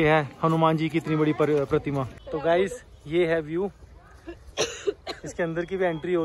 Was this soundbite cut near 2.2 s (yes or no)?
yes